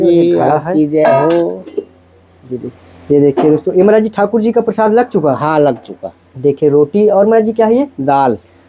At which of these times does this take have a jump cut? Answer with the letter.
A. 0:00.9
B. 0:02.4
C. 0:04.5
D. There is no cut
D